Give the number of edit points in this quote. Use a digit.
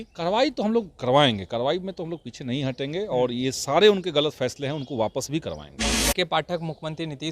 1